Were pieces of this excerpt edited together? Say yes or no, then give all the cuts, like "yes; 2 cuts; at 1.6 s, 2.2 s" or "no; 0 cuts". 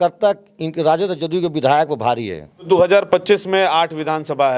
yes; 1 cut; at 2.6 s